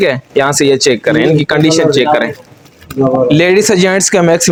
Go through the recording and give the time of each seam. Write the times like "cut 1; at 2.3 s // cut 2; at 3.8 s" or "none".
none